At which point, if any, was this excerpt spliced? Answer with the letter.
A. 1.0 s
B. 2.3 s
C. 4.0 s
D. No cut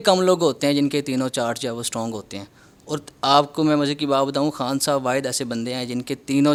D